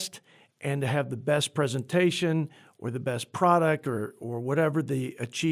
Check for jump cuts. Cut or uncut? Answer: uncut